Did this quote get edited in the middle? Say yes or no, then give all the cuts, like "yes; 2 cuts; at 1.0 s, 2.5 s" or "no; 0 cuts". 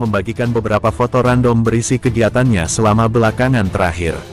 no; 0 cuts